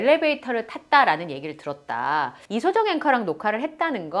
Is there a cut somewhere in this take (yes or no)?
yes